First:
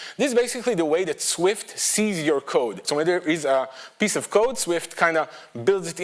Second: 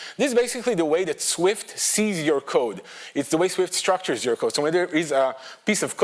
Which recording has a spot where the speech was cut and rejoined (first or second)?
first